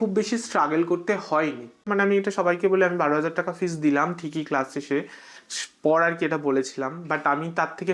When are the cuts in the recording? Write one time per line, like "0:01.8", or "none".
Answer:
0:01.9